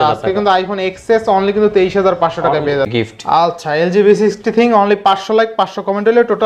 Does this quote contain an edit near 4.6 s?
no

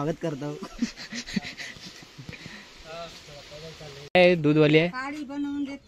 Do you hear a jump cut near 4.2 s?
yes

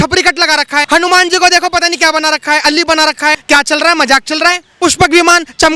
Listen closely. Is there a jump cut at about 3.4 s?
yes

